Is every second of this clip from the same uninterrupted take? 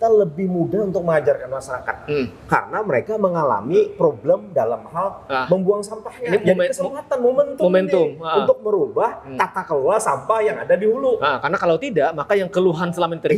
yes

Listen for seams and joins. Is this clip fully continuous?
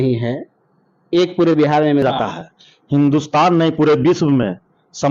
no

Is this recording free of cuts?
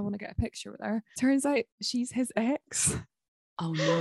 no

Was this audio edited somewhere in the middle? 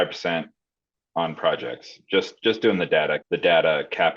yes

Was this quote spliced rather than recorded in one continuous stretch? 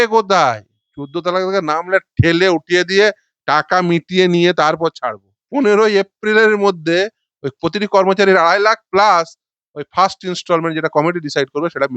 yes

